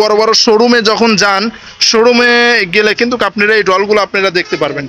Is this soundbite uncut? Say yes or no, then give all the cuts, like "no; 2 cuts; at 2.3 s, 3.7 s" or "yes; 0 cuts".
yes; 0 cuts